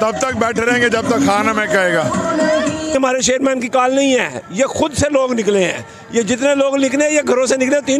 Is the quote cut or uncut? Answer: cut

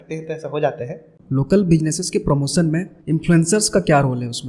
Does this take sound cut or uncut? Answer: cut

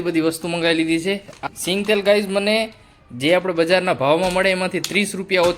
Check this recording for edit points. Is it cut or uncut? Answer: cut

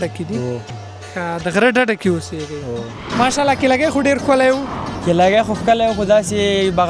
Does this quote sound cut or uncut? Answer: cut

